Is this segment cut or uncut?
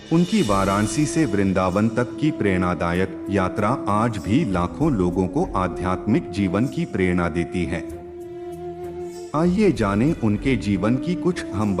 uncut